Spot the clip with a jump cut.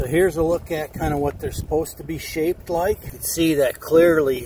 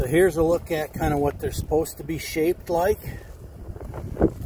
first; 1 cut; at 3.2 s

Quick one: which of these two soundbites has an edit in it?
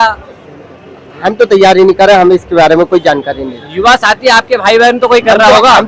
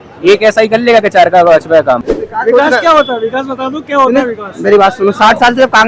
second; 1 cut; at 2.1 s

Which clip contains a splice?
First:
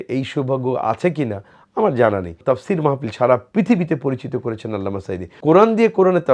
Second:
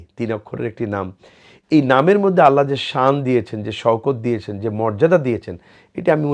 first; 2 cuts; at 2.4 s, 5.3 s

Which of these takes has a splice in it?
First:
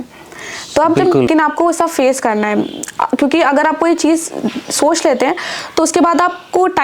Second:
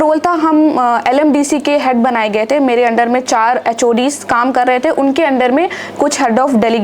first; 1 cut; at 1.3 s

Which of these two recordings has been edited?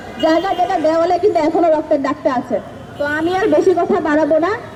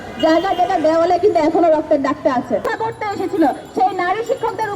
second; 1 cut; at 2.7 s

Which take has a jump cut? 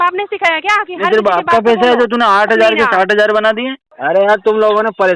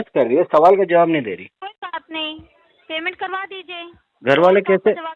first; 1 cut; at 3.9 s

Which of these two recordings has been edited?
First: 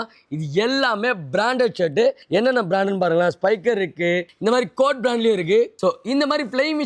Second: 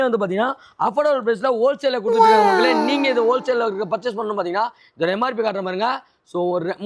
first; 3 cuts; at 2.2 s, 4.3 s, 5.7 s

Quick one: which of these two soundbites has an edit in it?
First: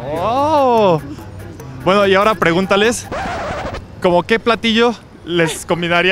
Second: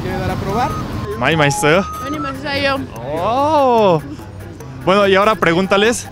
second; 1 cut; at 1.0 s

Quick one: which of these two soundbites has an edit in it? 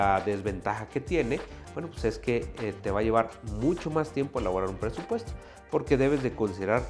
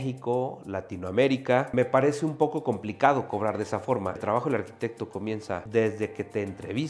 second; 3 cuts; at 1.7 s, 4.2 s, 5.6 s

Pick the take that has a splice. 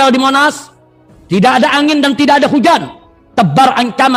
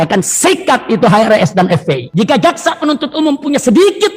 second; 1 cut; at 2.0 s

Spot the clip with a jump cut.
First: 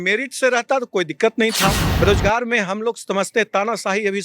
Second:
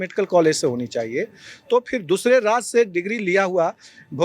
first; 1 cut; at 1.9 s

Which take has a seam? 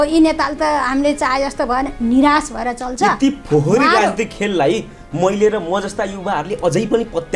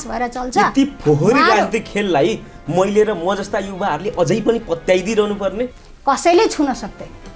second; 1 cut; at 5.8 s

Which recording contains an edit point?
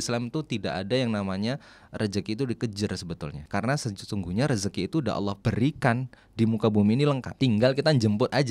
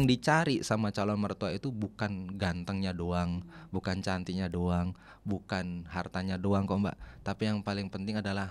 first; 3 cuts; at 3.4 s, 5.4 s, 7.3 s

